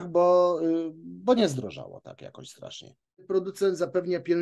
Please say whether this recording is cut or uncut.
cut